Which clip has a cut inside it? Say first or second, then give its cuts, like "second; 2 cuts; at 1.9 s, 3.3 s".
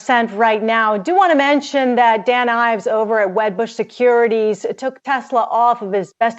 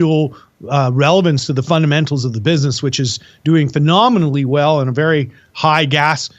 second; 1 cut; at 3.1 s